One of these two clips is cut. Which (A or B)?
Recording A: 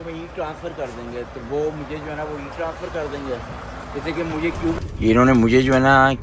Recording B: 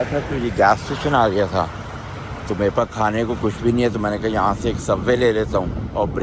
A